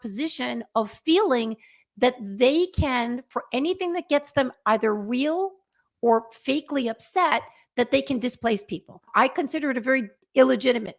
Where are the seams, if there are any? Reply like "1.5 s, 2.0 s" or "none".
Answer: 9.0 s